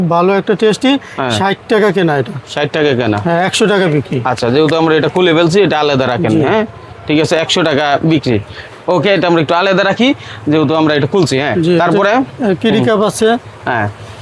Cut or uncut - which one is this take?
uncut